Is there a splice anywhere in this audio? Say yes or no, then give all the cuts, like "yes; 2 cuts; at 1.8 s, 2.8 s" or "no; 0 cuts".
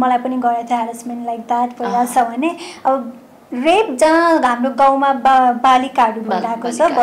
no; 0 cuts